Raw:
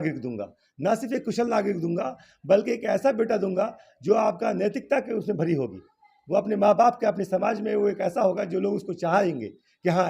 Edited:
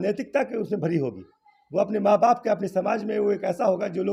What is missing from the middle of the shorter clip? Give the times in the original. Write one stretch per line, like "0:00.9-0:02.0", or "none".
none